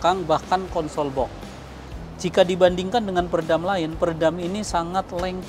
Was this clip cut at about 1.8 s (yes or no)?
yes